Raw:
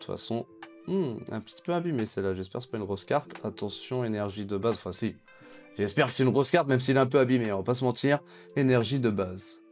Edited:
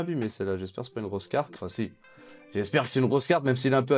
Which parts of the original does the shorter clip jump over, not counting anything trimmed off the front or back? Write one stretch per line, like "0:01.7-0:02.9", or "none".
0:03.4-0:04.8